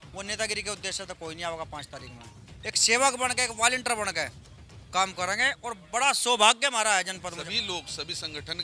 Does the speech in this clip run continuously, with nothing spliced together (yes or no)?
no